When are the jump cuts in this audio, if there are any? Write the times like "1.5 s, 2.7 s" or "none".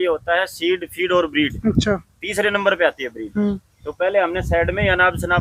none